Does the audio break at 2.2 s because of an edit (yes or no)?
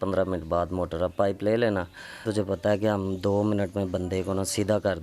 yes